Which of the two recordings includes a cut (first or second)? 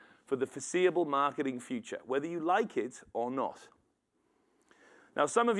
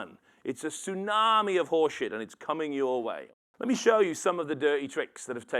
second